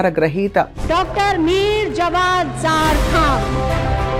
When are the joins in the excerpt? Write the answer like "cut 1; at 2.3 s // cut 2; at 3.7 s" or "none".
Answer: none